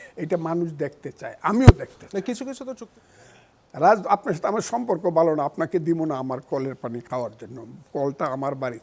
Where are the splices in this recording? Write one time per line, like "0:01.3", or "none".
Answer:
0:02.7